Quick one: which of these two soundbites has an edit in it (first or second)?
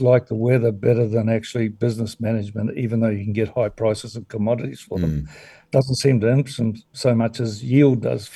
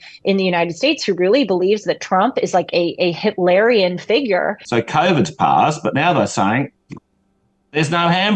second